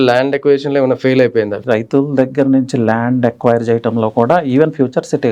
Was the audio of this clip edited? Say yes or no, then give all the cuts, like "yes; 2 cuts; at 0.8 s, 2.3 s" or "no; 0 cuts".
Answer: yes; 1 cut; at 1.6 s